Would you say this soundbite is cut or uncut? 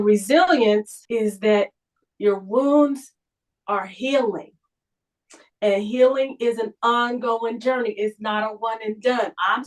cut